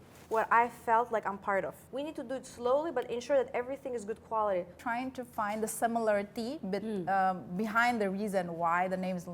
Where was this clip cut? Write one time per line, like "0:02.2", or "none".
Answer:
0:01.8
0:04.7